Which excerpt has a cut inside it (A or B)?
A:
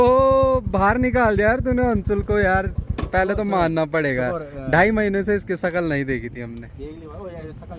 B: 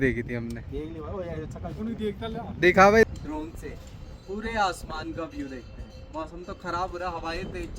B